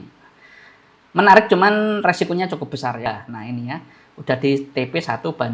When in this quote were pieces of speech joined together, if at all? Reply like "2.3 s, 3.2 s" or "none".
3.1 s